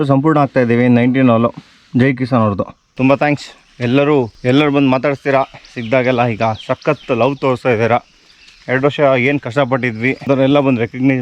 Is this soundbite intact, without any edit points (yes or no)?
yes